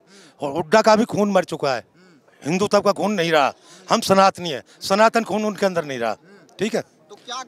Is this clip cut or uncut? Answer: uncut